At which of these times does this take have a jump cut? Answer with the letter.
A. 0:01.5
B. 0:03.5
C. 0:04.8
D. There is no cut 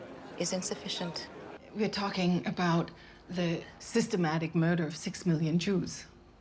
A